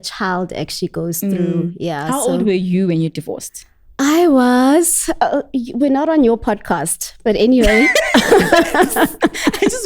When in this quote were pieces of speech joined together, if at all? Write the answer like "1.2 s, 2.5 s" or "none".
none